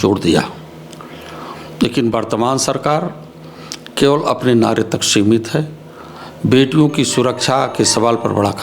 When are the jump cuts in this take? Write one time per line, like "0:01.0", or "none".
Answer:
none